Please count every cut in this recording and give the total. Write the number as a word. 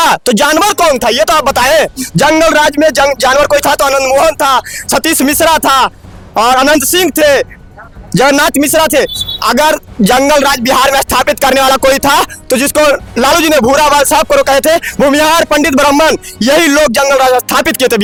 zero